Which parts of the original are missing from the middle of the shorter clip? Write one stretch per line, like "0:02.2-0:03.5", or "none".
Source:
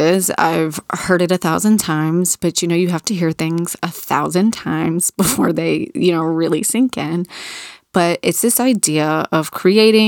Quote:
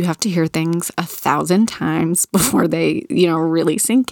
none